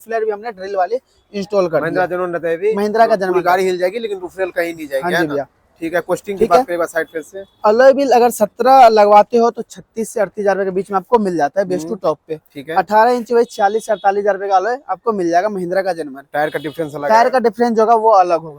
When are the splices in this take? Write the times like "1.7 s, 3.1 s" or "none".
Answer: none

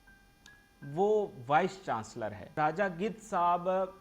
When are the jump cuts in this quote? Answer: 2.5 s

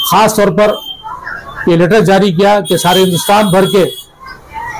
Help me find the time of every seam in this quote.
none

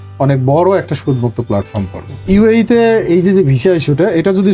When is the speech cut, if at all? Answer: 2.3 s

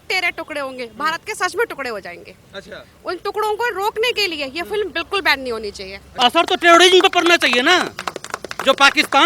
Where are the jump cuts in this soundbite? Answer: 6.0 s

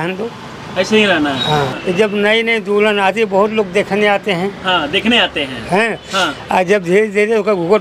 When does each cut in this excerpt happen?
1.7 s

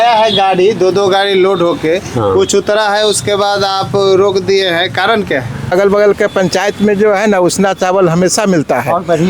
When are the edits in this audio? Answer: 5.7 s

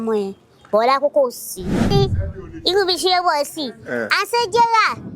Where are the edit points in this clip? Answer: 1.9 s

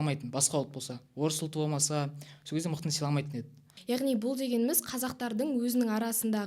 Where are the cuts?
3.7 s

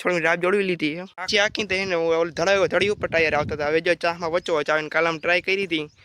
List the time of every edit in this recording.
1.3 s

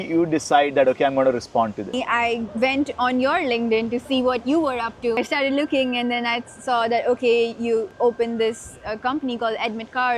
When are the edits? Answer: 1.9 s, 5.1 s, 7.9 s

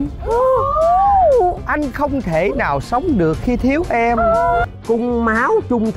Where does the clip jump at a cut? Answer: 4.7 s

